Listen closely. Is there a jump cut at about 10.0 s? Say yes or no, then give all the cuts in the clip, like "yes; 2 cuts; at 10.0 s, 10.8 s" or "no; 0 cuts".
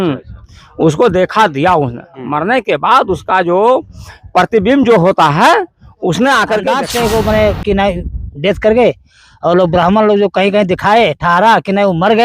no; 1 cut; at 6.8 s